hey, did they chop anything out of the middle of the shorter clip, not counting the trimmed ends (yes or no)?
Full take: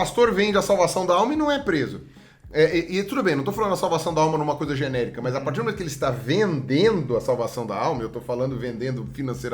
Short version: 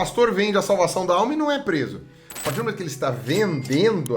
yes